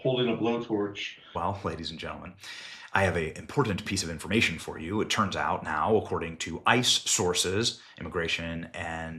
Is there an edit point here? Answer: yes; 1 cut; at 1.2 s

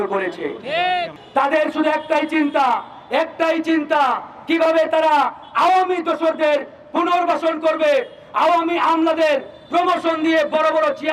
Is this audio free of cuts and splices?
no; 1 cut; at 1.2 s

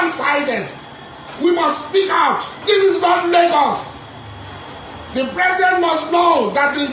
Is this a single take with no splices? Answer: yes; 0 cuts

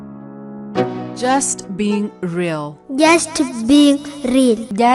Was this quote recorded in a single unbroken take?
yes; 0 cuts

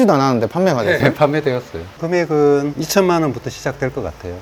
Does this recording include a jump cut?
no; 0 cuts

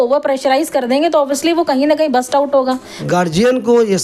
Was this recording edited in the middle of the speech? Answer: yes; 1 cut; at 2.9 s

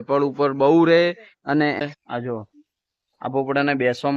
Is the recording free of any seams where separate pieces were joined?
no; 1 cut; at 1.8 s

